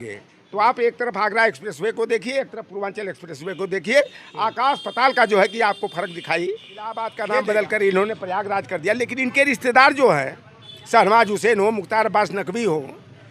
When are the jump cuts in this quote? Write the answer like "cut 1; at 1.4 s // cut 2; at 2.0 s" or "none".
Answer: cut 1; at 7.1 s